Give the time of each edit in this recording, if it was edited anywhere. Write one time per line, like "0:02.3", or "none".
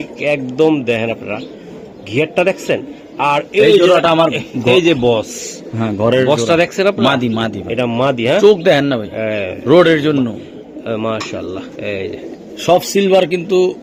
none